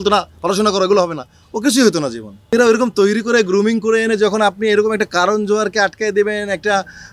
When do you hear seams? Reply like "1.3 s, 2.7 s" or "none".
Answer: 2.4 s